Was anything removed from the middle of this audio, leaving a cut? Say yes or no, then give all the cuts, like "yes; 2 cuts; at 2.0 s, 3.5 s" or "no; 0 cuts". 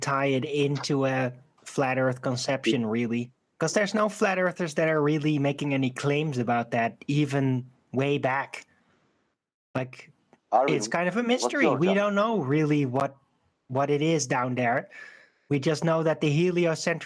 no; 0 cuts